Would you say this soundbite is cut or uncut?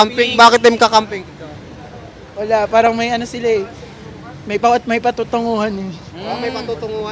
uncut